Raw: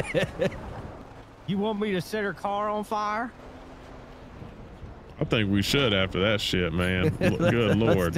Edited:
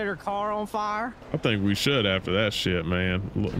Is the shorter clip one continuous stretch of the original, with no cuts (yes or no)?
no